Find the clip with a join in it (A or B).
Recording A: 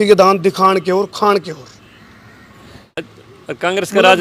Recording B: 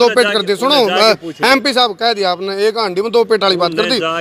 A